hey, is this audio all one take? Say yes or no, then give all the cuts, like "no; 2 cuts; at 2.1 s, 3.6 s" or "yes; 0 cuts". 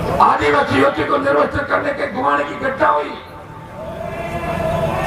yes; 0 cuts